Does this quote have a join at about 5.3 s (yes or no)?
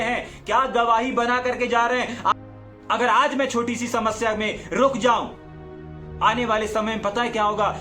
no